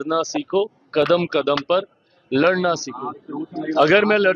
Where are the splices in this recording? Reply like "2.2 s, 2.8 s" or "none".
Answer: none